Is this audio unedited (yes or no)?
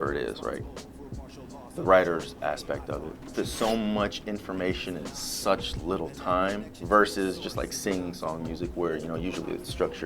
no